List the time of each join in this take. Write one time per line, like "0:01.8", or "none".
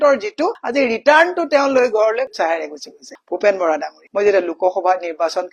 0:04.0